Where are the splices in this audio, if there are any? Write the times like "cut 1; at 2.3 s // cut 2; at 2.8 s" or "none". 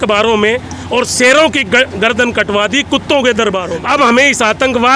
cut 1; at 3.7 s